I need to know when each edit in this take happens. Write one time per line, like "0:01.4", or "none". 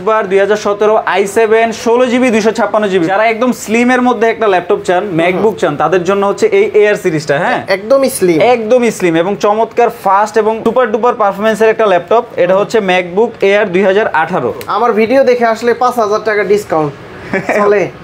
0:03.1
0:10.6
0:14.7